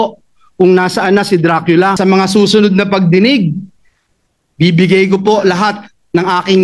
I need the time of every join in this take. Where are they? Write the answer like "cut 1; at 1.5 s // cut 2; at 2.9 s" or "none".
cut 1; at 2.0 s